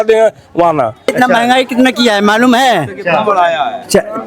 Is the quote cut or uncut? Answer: cut